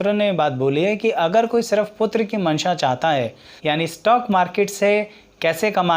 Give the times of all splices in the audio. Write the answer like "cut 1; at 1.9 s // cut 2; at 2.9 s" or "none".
cut 1; at 3.5 s